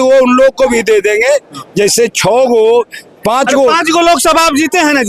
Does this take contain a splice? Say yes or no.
no